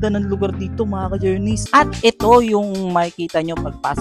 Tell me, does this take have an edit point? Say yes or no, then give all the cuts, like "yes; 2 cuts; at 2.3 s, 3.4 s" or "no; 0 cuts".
yes; 1 cut; at 1.6 s